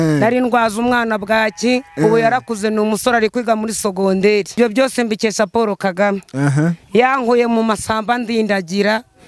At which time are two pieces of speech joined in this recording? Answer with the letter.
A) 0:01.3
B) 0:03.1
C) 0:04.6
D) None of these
C